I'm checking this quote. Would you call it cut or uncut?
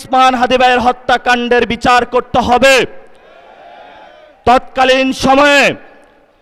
uncut